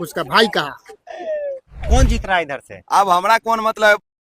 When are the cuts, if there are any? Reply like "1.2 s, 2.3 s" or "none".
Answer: 1.8 s

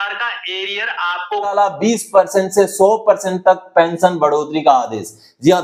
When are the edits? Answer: 1.5 s

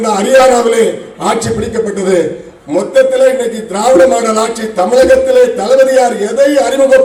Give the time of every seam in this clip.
none

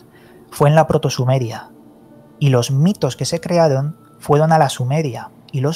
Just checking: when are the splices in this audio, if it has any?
none

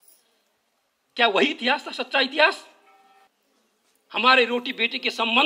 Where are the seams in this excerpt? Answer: 3.3 s

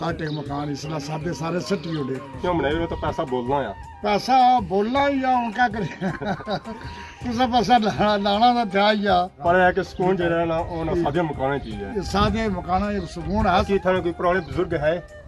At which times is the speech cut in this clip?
2.4 s, 9.3 s, 13.7 s

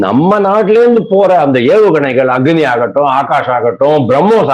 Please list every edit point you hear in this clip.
none

